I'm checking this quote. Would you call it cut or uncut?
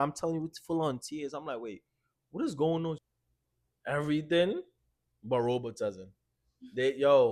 cut